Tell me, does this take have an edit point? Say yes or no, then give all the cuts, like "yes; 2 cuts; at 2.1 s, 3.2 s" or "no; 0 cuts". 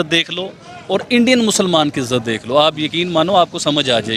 no; 0 cuts